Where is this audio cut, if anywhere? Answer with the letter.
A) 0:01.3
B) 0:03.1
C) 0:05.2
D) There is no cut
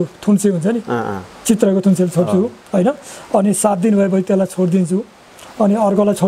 D